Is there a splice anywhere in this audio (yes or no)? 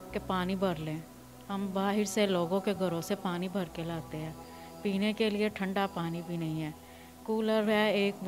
no